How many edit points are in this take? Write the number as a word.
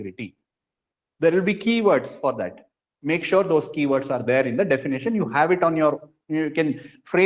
zero